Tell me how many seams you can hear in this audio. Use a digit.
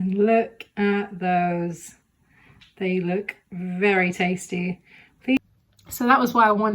1